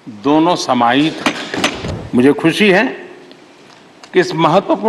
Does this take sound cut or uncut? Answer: cut